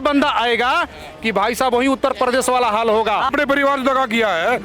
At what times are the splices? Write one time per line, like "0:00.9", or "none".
0:03.3